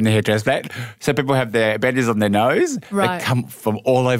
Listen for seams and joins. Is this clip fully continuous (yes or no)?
yes